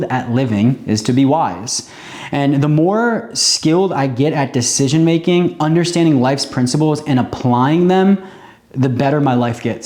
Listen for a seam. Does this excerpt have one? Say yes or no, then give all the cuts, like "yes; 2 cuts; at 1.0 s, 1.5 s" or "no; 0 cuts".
no; 0 cuts